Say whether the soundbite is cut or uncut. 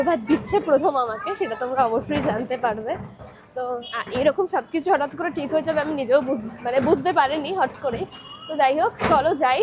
uncut